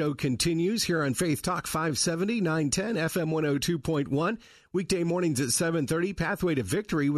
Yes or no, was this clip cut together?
no